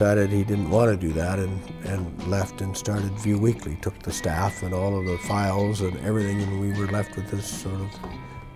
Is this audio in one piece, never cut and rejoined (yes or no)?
yes